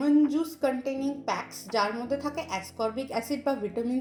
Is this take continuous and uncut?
yes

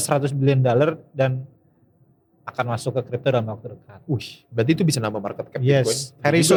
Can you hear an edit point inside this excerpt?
no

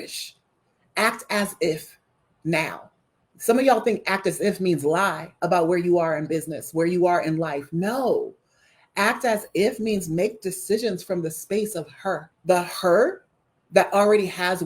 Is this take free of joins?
no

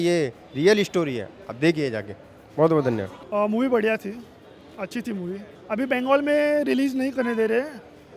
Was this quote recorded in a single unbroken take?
yes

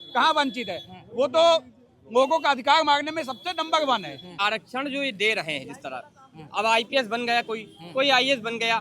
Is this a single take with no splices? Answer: no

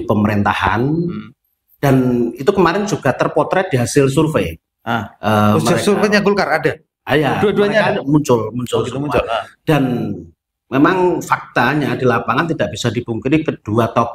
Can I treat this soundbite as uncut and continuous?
yes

